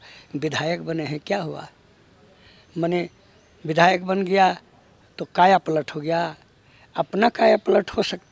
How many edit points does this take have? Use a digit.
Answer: 0